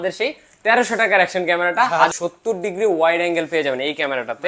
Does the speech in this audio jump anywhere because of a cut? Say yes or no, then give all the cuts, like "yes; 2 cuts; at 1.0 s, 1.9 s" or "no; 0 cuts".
yes; 1 cut; at 2.1 s